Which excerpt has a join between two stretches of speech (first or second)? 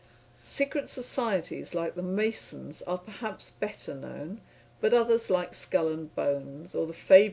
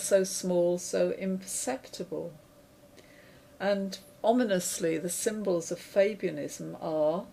first